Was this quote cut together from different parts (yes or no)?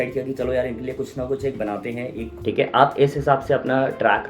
yes